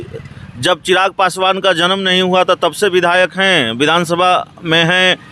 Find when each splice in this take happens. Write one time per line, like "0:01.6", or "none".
none